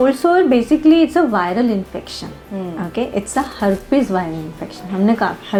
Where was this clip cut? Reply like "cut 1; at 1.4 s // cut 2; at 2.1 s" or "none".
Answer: none